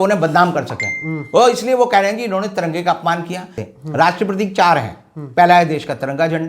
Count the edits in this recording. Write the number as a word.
one